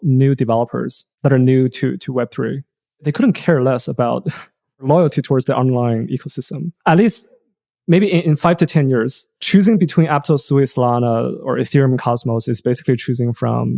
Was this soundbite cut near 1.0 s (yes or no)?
yes